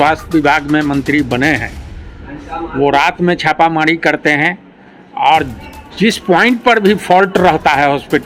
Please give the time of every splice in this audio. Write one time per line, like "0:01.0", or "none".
none